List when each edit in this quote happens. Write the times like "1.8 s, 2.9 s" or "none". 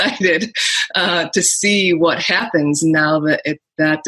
none